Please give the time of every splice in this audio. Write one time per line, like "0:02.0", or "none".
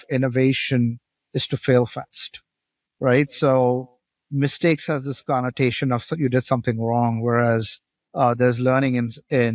none